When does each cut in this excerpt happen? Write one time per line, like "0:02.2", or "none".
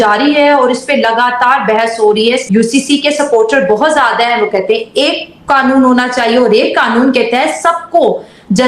0:02.4